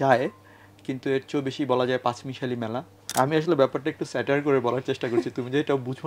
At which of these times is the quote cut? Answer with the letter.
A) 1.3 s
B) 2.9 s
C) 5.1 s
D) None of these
B